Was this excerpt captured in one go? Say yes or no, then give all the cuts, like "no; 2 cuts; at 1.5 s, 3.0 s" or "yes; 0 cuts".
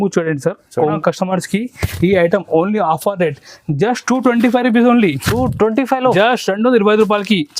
no; 1 cut; at 1.0 s